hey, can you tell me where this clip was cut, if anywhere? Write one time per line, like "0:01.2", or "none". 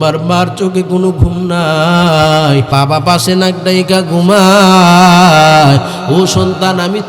0:02.7